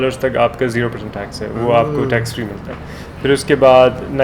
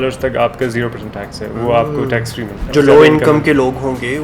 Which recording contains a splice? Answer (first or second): second